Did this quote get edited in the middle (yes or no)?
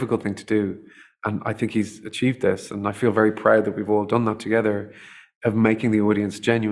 no